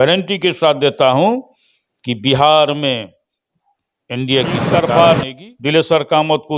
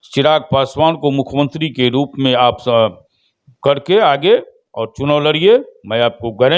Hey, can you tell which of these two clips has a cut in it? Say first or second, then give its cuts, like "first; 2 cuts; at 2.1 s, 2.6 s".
first; 1 cut; at 4.7 s